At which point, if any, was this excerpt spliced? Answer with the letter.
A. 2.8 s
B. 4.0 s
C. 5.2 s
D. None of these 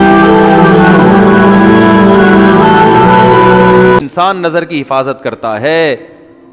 B